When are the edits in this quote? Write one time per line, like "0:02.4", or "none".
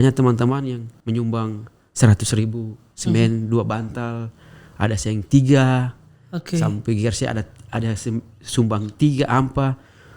0:00.9